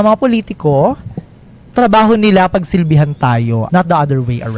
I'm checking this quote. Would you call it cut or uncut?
cut